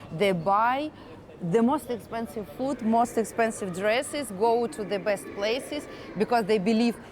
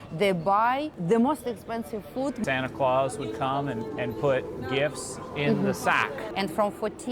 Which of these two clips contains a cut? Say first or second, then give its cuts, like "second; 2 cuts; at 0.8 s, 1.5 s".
second; 3 cuts; at 0.9 s, 2.4 s, 6.2 s